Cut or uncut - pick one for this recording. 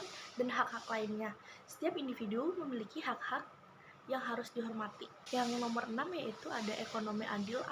cut